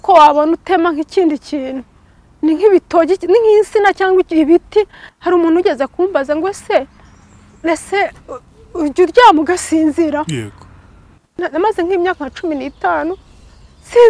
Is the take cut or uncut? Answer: cut